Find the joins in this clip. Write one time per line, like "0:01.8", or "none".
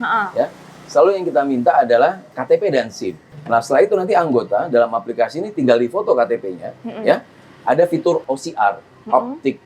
0:02.3
0:03.3
0:08.2